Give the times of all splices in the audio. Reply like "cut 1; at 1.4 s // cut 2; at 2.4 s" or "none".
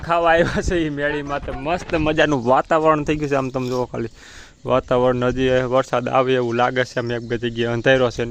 none